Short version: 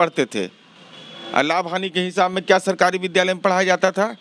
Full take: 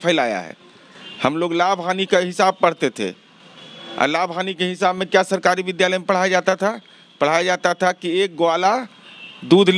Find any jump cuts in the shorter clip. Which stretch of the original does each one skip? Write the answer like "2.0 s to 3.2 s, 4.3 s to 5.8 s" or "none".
none